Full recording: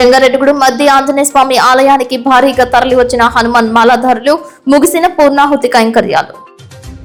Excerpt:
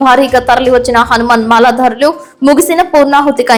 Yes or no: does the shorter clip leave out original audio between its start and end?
no